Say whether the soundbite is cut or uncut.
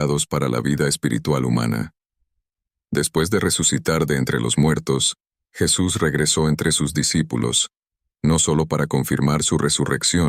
uncut